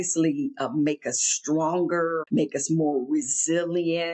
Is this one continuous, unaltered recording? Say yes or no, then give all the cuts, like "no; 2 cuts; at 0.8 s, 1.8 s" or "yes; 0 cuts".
no; 1 cut; at 2.2 s